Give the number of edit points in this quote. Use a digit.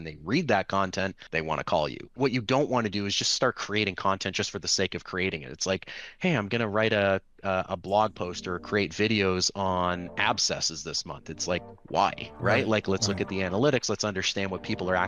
2